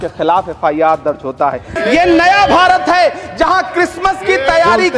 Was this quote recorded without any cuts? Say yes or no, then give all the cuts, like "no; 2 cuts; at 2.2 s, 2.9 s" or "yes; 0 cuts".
no; 1 cut; at 1.7 s